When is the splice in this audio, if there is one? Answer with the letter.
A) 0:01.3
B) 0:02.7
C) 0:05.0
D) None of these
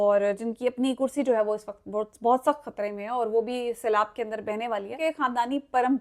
C